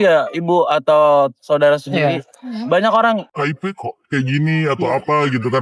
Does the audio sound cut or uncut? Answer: uncut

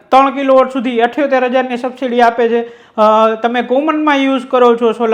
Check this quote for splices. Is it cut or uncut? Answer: uncut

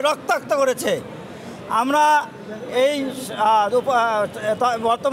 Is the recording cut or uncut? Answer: uncut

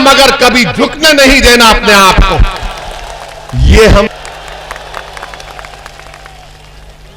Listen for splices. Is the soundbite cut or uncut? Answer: cut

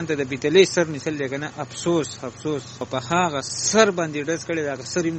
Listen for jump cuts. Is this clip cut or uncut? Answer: cut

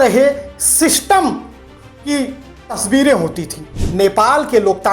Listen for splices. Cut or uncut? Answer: cut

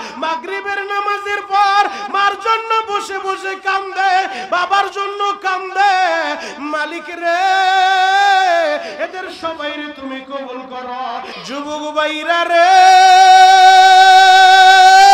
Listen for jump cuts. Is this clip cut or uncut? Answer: cut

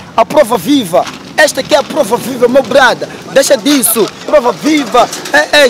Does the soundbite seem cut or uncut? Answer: uncut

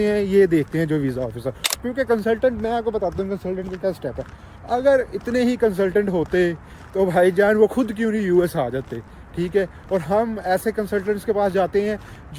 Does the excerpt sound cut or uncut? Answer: cut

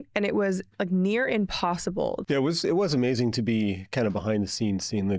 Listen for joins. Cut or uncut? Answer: cut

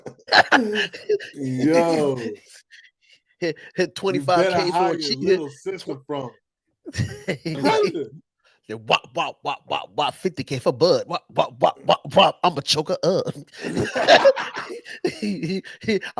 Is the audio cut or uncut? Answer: cut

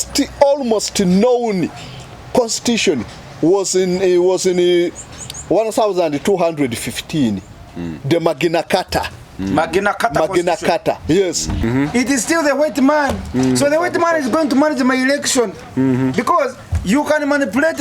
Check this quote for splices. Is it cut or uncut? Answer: cut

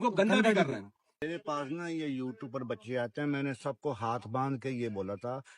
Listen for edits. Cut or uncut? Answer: cut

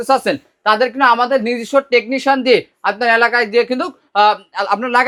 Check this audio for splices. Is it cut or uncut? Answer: uncut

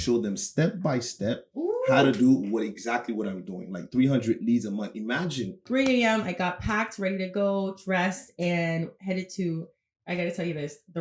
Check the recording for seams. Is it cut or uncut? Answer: cut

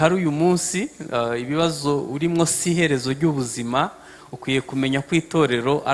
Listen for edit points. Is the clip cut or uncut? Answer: uncut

